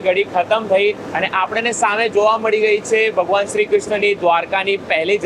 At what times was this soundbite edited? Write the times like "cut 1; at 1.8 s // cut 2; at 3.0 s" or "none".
none